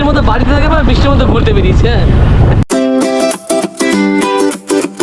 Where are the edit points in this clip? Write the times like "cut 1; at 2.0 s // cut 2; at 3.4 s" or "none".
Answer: cut 1; at 2.7 s